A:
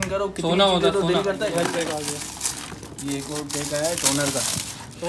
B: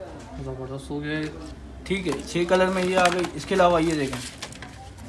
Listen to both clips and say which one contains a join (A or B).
A